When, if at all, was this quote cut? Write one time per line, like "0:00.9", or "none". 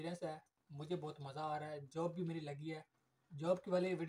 none